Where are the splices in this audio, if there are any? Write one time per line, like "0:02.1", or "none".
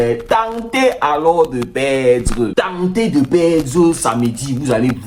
0:02.5

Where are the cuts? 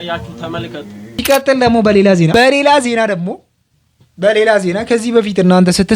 0:01.2

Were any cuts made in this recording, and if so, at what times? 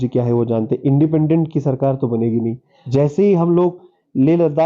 0:02.7

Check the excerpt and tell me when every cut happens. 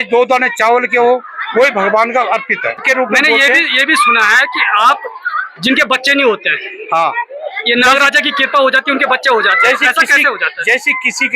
0:02.8

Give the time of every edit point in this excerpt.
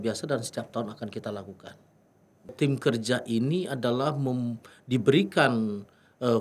0:02.5

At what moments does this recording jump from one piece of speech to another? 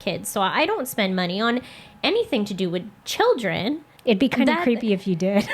0:03.9

